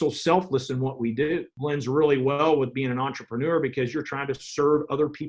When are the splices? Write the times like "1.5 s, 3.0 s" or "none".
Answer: 1.5 s